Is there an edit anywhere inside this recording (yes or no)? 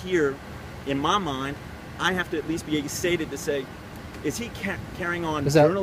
no